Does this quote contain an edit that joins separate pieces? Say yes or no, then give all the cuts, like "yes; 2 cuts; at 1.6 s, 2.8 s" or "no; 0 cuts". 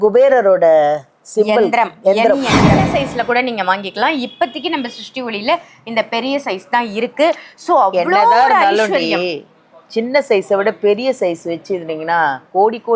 yes; 1 cut; at 2.8 s